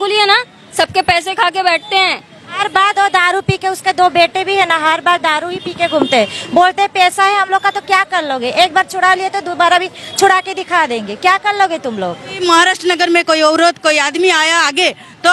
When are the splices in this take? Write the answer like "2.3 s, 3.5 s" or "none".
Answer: 2.5 s, 12.4 s